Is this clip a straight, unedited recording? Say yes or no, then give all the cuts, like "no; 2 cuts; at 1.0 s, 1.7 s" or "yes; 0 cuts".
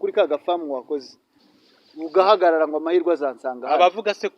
no; 1 cut; at 1.5 s